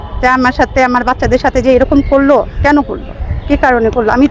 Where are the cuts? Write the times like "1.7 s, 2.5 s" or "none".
none